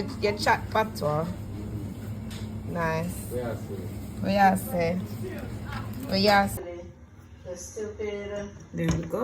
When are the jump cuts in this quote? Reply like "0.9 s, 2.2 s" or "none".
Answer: 6.6 s

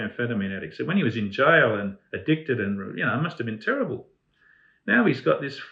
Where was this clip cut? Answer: none

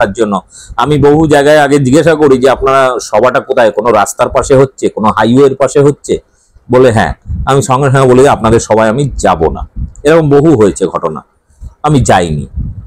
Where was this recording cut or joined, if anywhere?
none

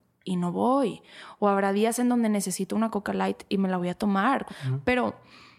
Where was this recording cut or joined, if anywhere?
4.4 s

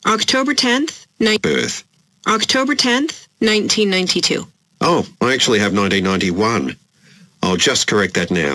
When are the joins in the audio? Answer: none

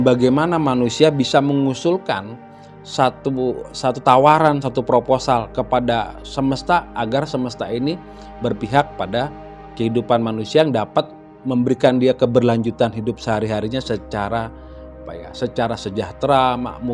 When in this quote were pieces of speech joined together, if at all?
none

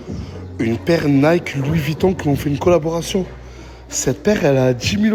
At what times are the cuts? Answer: none

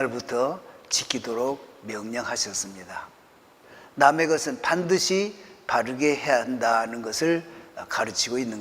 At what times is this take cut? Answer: 3.8 s

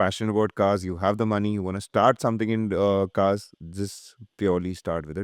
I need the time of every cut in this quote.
none

